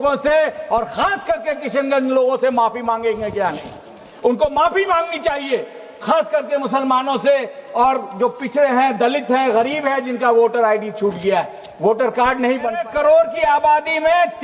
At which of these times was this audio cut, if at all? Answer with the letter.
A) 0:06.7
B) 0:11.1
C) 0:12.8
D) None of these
C